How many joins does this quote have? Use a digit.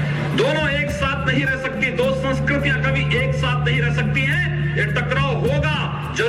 0